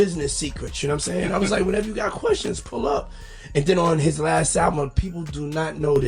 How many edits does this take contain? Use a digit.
0